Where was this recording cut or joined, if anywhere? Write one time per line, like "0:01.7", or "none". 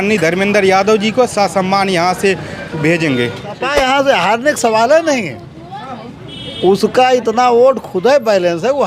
0:03.6

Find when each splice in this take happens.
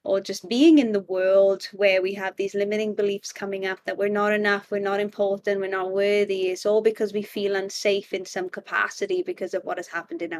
none

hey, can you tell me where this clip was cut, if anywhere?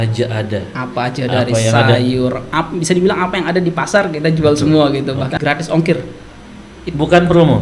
0:05.4

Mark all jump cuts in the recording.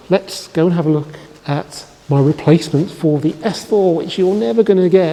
none

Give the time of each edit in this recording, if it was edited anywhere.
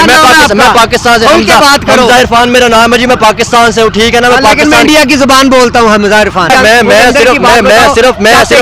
0:06.5

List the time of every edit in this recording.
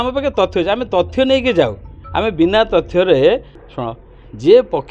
0:03.6

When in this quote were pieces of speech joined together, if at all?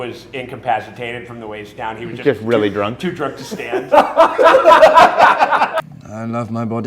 0:05.8

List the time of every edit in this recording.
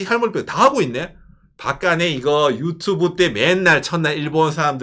none

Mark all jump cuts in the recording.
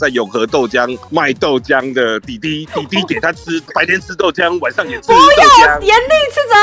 none

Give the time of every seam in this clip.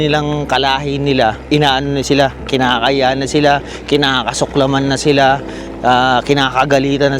0:01.4

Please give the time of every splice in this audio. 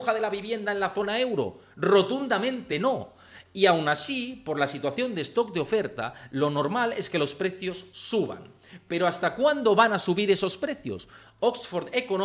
none

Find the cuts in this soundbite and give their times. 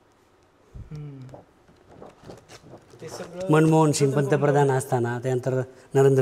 none

